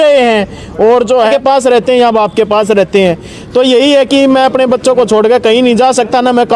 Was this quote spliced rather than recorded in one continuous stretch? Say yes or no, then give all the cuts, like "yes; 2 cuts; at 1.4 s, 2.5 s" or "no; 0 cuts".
yes; 1 cut; at 1.3 s